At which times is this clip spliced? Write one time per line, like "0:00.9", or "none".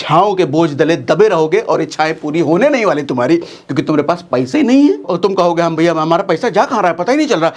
0:05.1